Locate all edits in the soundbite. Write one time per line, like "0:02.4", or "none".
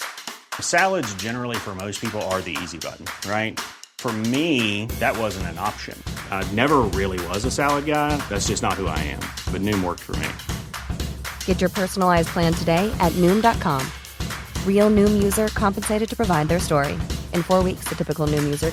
none